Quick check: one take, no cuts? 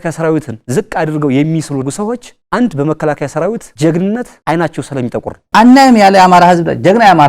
no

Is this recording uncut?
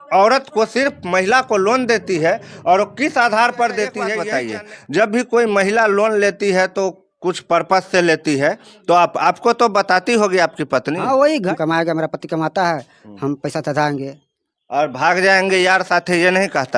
no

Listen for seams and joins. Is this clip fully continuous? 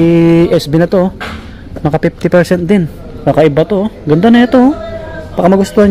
yes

